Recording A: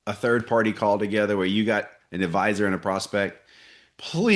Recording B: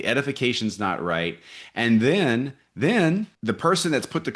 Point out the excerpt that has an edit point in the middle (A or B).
B